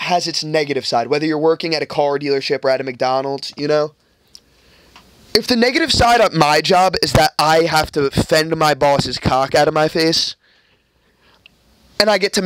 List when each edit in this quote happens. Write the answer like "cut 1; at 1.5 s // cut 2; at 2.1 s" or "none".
none